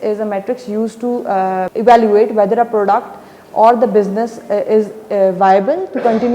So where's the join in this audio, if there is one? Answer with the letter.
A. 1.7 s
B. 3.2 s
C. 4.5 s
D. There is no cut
A